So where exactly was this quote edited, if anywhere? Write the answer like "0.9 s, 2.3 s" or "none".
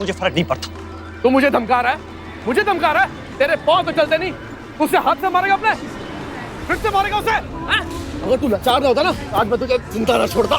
1.1 s